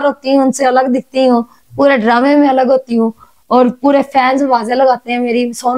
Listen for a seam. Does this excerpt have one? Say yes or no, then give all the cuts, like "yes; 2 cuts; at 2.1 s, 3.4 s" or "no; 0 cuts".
no; 0 cuts